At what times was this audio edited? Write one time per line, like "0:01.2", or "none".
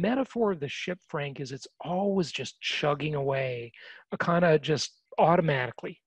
0:05.0